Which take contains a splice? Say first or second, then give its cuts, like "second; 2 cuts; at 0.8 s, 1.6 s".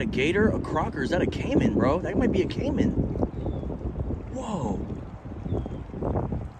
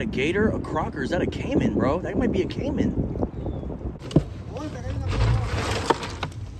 second; 1 cut; at 4.0 s